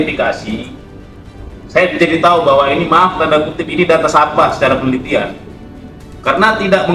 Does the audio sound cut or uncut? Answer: uncut